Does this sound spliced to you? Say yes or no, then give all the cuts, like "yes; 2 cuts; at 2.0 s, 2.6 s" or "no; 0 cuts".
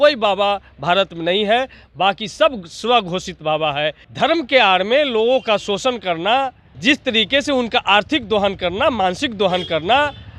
yes; 2 cuts; at 4.0 s, 6.7 s